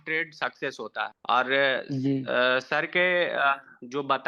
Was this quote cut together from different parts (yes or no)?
no